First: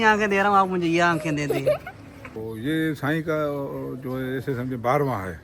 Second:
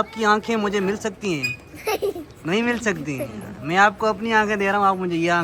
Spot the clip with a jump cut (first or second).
first